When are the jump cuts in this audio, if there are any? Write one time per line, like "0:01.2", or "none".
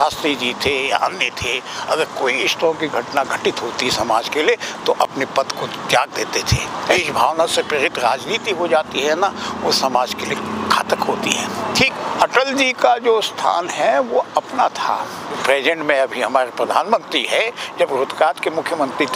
0:07.0
0:11.9
0:15.4